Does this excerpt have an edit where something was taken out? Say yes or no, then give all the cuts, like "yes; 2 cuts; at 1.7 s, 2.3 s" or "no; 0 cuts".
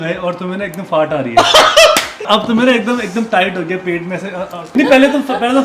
yes; 2 cuts; at 2.3 s, 4.7 s